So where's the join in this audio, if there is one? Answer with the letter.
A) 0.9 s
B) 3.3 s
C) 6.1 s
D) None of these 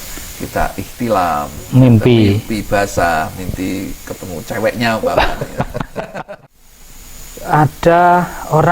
C